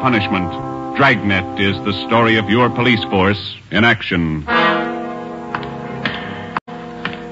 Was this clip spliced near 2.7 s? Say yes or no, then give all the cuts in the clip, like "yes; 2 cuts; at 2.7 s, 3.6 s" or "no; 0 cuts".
no; 1 cut; at 4.8 s